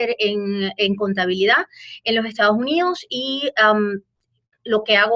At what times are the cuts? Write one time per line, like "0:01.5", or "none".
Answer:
none